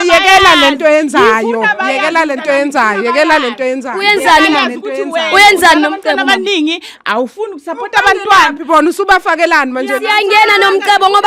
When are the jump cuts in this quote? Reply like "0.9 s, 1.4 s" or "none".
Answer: none